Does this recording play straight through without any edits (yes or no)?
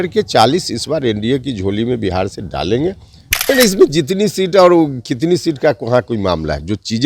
no